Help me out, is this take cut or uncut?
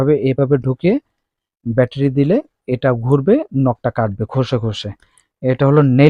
uncut